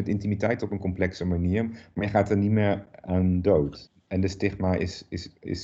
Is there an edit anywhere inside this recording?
yes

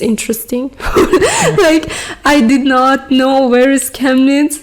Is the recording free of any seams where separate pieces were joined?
yes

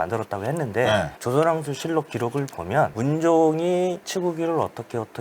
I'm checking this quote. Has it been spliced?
no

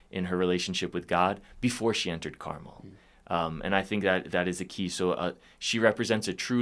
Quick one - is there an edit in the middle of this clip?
no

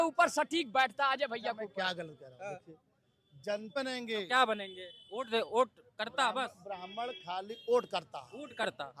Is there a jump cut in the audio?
yes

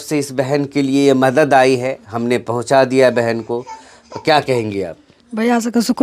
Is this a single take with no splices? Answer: yes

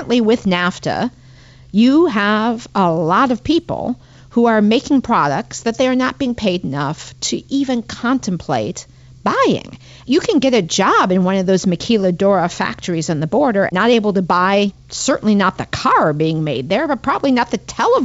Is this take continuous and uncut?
no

